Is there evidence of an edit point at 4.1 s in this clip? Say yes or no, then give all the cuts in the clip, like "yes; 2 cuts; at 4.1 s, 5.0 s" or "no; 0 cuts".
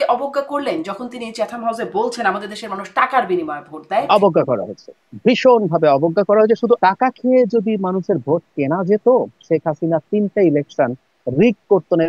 yes; 2 cuts; at 4.1 s, 6.8 s